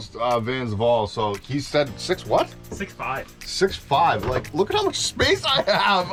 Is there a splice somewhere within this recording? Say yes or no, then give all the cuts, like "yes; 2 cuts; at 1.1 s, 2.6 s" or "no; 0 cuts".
no; 0 cuts